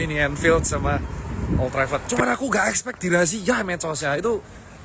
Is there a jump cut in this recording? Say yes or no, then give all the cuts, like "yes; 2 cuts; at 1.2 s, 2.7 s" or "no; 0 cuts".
yes; 1 cut; at 2.1 s